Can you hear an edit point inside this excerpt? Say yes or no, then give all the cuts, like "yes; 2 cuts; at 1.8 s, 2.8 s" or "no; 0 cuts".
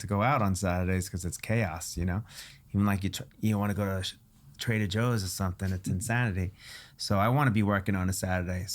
no; 0 cuts